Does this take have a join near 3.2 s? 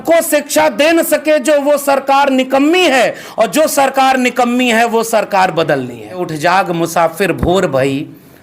no; 1 cut; at 6.3 s

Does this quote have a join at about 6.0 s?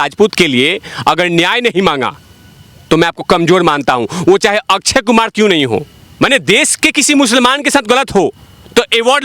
yes; 1 cut; at 6.0 s

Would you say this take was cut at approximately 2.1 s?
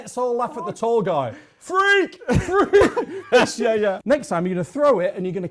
no; 1 cut; at 4.0 s

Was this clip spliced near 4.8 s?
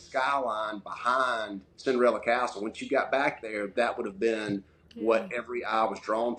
no; 0 cuts

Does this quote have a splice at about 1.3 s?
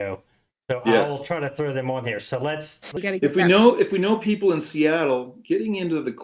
no; 1 cut; at 3.0 s

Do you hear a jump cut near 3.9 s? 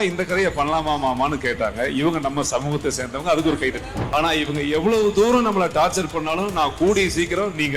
yes; 1 cut; at 3.9 s

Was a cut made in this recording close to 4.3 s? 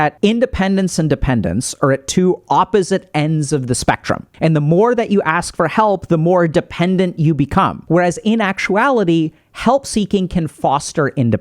yes; 2 cuts; at 4.3 s, 7.8 s

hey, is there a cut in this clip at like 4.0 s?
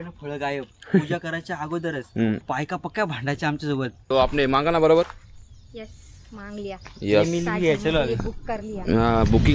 yes; 2 cuts; at 2.4 s, 4.0 s

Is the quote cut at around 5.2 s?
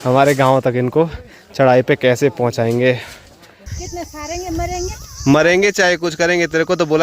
no; 1 cut; at 3.6 s

